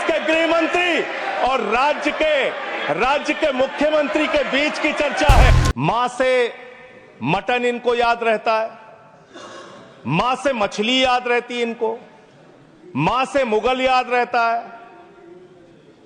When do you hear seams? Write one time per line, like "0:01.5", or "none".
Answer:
0:05.5